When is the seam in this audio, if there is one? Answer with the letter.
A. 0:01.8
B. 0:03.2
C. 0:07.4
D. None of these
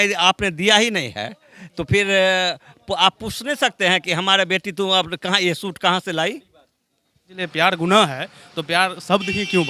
C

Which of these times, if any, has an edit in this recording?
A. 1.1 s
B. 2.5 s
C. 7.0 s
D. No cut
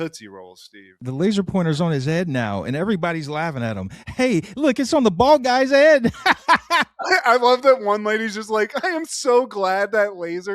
A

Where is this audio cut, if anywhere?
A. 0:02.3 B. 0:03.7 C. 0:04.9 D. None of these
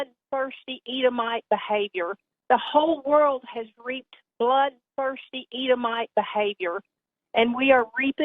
A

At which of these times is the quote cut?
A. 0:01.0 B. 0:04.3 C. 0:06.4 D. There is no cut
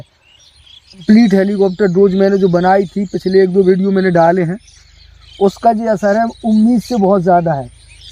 A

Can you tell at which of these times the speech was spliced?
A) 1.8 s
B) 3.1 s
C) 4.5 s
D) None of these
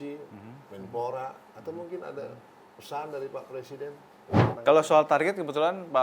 C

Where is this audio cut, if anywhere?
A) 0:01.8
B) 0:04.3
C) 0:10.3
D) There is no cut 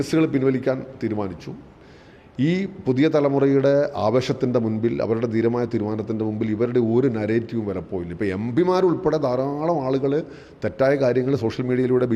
A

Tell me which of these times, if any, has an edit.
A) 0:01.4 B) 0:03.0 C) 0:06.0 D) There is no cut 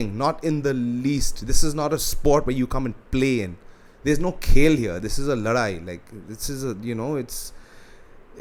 D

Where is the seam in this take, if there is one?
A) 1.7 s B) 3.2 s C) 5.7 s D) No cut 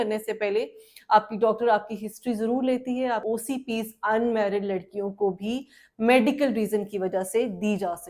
B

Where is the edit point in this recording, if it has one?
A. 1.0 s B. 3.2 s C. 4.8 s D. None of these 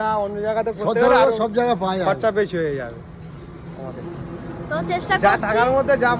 D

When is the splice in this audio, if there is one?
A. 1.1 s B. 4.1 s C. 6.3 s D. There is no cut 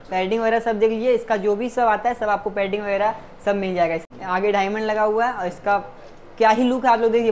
B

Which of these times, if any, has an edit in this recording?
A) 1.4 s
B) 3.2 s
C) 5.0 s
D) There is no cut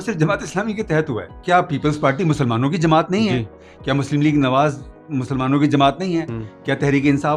A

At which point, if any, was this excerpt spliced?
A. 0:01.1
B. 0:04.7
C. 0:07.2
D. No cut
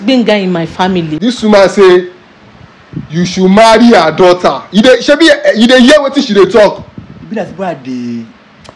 A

